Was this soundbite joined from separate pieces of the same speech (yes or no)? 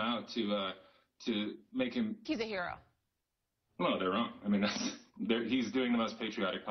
no